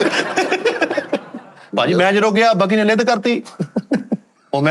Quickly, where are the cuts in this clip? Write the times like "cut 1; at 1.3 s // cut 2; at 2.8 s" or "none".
cut 1; at 1.7 s